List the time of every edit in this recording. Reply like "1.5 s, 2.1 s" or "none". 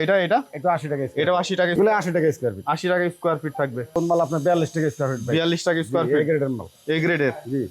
1.8 s, 4.0 s